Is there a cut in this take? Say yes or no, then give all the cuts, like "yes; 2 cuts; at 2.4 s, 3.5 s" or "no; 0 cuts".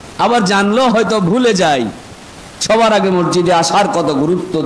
no; 0 cuts